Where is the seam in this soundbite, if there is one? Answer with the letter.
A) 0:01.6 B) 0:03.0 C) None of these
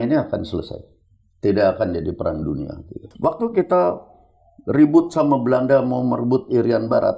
B